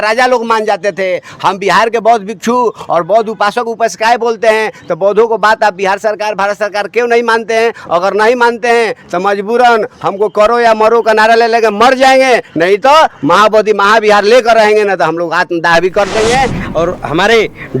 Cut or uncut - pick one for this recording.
cut